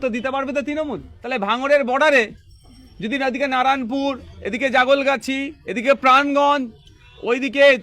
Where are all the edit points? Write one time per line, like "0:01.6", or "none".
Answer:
0:01.1